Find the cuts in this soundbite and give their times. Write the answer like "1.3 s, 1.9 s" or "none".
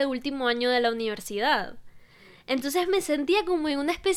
none